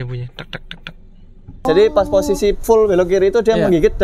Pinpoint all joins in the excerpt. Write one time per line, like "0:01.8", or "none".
0:01.6